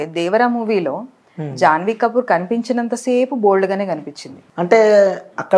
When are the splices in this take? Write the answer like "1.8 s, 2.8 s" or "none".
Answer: 4.5 s